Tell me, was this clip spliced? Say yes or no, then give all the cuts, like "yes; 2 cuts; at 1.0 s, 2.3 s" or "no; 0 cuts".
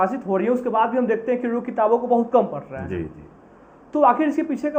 no; 0 cuts